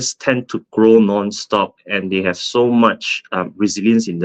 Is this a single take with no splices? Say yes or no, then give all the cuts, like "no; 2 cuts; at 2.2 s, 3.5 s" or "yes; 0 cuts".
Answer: yes; 0 cuts